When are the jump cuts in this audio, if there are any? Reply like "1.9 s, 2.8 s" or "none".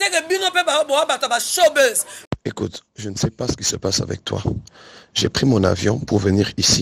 2.2 s